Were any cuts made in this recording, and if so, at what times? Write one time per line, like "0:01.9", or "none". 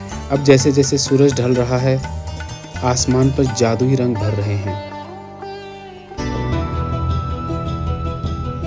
0:06.2